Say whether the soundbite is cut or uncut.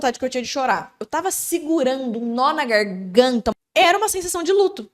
cut